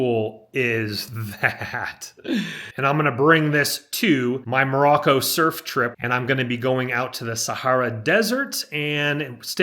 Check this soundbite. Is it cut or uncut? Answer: cut